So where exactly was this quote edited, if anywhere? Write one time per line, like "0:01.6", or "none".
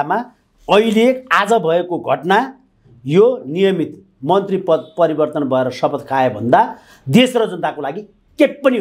none